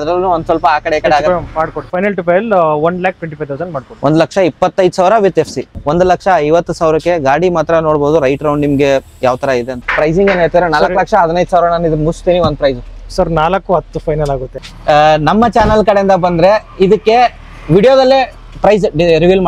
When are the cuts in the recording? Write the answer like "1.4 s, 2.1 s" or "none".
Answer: 1.8 s, 5.6 s, 9.7 s, 14.5 s

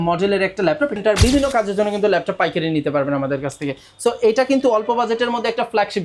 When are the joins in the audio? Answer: 1.0 s

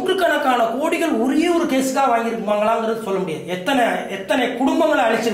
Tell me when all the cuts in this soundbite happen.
none

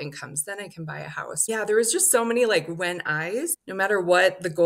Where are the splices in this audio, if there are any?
3.6 s

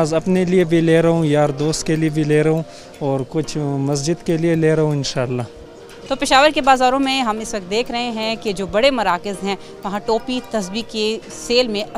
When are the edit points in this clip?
5.9 s

